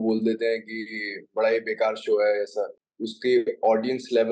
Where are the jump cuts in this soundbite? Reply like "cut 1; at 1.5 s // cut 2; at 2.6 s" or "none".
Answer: cut 1; at 2.8 s

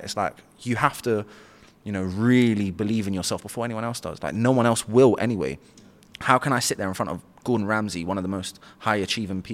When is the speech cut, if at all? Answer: none

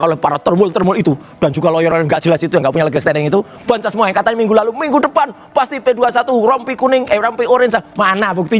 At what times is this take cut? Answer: none

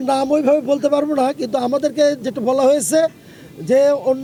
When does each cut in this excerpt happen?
none

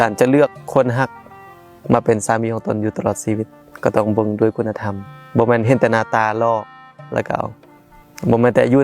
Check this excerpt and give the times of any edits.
cut 1; at 3.6 s

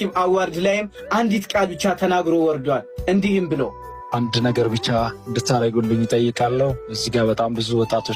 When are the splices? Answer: none

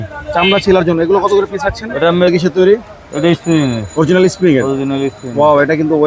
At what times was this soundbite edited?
cut 1; at 2.3 s

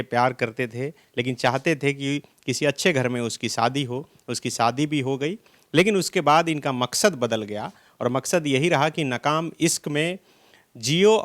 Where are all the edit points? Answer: none

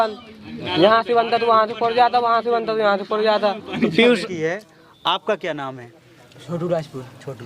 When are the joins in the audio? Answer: cut 1; at 4.3 s

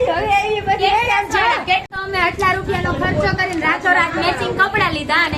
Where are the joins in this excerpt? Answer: cut 1; at 1.9 s

